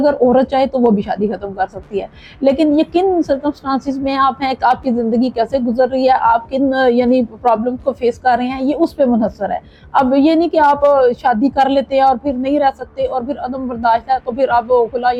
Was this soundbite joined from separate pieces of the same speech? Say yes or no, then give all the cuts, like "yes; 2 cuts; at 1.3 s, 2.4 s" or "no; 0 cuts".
no; 0 cuts